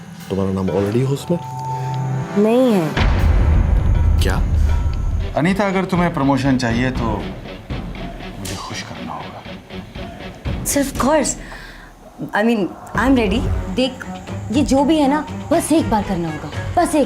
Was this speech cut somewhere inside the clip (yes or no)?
yes